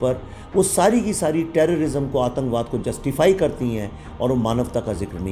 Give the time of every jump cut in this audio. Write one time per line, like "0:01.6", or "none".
none